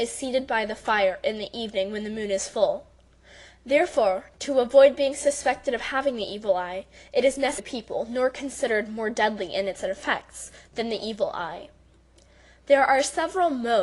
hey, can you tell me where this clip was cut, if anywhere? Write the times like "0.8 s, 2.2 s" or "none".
none